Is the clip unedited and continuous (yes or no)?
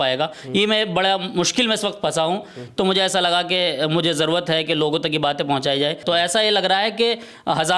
no